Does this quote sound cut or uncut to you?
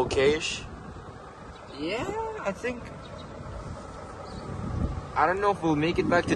uncut